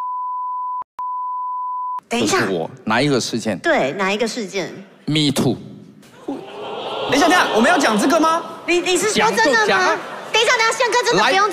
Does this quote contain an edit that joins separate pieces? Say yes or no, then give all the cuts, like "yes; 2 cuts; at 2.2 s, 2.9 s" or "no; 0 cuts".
no; 0 cuts